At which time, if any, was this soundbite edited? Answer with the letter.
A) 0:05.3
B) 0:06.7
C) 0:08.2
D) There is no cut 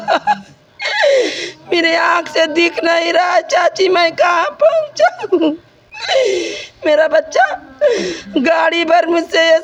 D